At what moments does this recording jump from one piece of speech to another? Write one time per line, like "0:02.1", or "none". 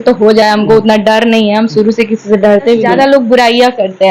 0:02.9